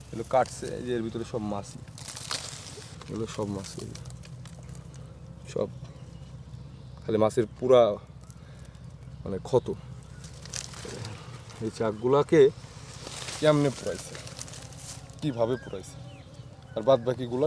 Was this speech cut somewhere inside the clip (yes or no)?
yes